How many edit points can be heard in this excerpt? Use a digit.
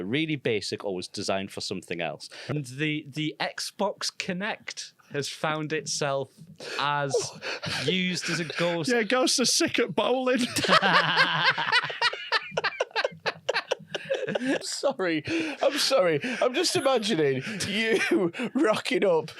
2